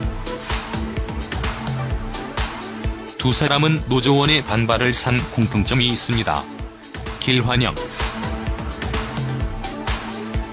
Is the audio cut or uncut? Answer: cut